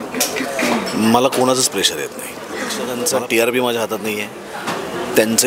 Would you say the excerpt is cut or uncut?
cut